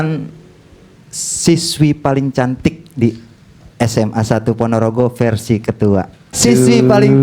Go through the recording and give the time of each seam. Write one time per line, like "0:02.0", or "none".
0:06.2